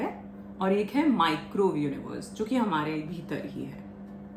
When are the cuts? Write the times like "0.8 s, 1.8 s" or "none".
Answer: none